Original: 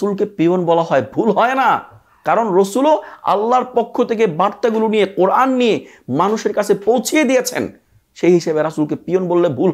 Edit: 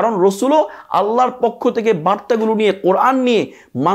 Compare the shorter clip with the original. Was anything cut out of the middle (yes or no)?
no